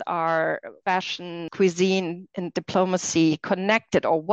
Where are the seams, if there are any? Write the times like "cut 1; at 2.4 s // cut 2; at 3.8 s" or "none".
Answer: cut 1; at 1.2 s

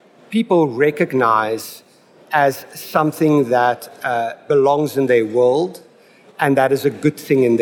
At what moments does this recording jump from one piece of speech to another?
cut 1; at 4.4 s

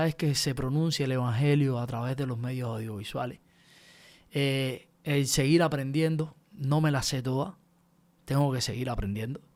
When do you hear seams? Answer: none

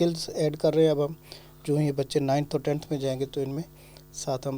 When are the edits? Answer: none

